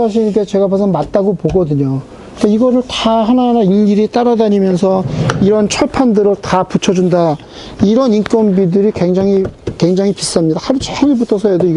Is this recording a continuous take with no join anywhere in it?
yes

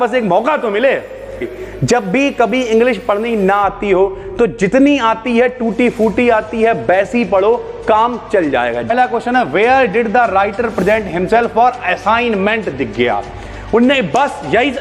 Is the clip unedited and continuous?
no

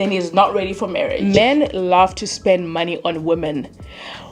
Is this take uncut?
no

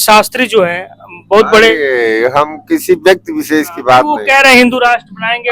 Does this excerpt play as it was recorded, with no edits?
yes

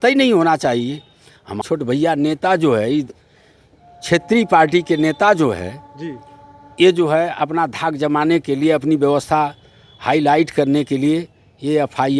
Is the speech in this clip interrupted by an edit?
yes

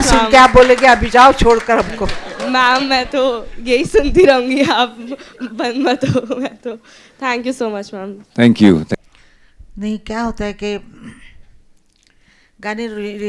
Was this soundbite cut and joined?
yes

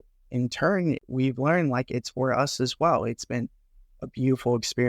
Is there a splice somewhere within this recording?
yes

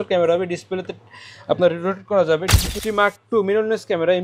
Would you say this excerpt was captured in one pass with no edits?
no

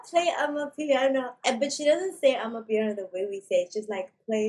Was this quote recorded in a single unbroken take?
no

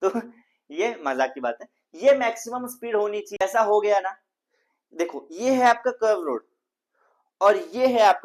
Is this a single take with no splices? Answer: no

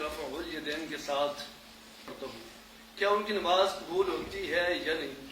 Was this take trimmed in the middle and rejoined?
yes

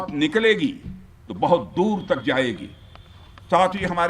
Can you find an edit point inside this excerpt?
no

